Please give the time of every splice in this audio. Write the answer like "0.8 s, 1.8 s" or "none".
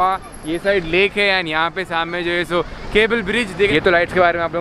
3.7 s